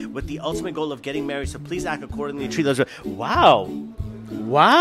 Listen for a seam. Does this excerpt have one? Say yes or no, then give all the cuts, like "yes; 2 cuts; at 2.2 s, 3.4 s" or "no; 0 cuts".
no; 0 cuts